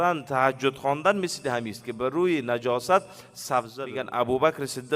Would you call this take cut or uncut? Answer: cut